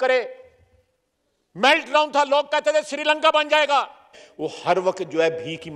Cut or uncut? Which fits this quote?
cut